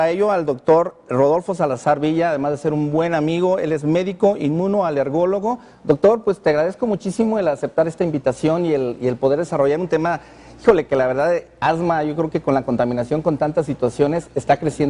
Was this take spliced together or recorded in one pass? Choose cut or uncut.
cut